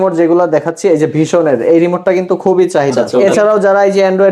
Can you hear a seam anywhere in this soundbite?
yes; 1 cut; at 3.0 s

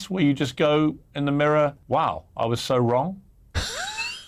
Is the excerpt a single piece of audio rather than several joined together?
no; 2 cuts; at 1.8 s, 3.4 s

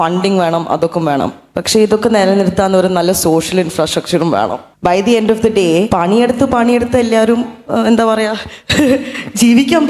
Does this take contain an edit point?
yes; 2 cuts; at 4.7 s, 5.9 s

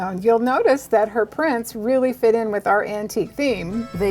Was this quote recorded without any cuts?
yes; 0 cuts

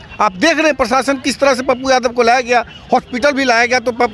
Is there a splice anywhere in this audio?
no; 0 cuts

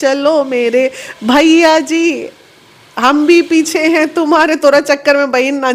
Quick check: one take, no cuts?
yes; 0 cuts

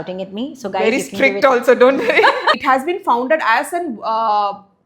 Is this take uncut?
no; 1 cut; at 2.6 s

